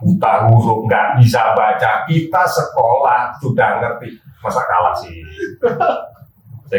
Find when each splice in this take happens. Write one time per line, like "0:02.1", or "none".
none